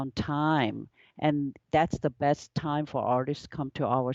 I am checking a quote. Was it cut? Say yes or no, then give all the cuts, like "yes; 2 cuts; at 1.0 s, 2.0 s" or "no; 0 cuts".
no; 0 cuts